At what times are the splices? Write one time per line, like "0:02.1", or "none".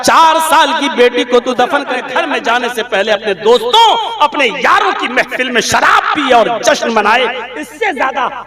0:02.0